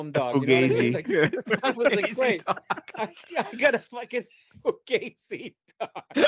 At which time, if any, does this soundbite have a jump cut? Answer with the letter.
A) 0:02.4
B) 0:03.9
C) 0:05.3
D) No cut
D